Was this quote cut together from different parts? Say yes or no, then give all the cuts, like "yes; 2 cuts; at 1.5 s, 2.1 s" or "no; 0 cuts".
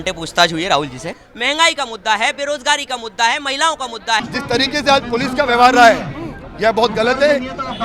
yes; 2 cuts; at 1.2 s, 4.3 s